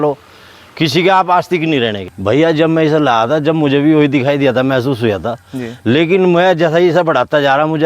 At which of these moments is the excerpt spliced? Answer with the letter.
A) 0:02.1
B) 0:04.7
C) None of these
A